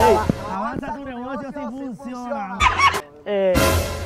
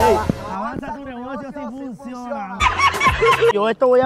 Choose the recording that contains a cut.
first; 1 cut; at 3.0 s

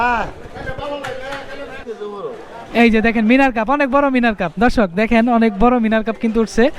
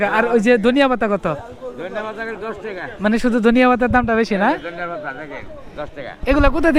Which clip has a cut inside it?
first; 1 cut; at 2.0 s

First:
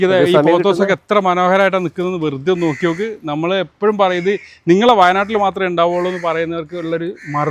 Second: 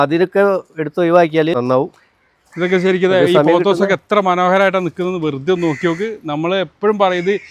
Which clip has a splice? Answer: second; 1 cut; at 1.5 s

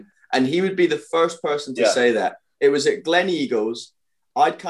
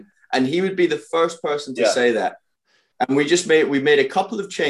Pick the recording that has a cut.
second; 1 cut; at 2.5 s

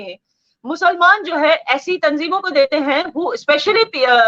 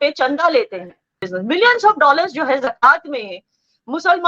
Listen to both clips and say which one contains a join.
second; 1 cut; at 1.2 s

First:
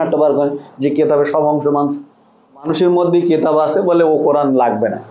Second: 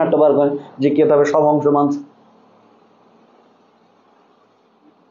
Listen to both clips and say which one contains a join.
first; 1 cut; at 2.7 s

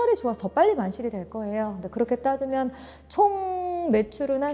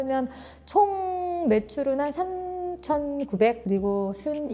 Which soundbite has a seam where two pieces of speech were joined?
second; 1 cut; at 3.6 s

